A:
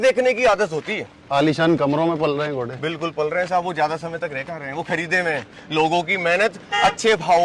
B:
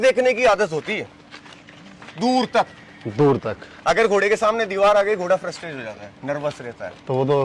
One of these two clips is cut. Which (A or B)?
A